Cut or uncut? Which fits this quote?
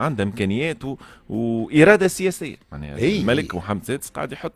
uncut